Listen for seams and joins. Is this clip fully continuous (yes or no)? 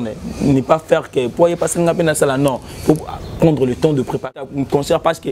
no